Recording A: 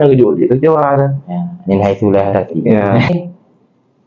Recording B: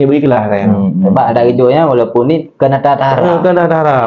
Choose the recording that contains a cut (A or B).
A